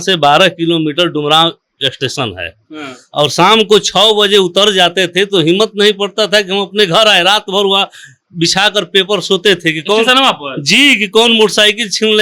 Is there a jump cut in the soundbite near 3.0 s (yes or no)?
no